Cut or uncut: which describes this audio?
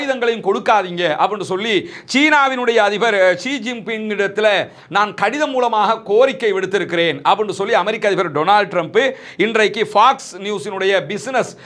uncut